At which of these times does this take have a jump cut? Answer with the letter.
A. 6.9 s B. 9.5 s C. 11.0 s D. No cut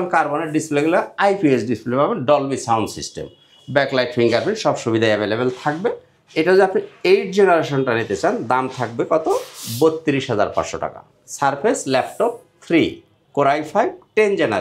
C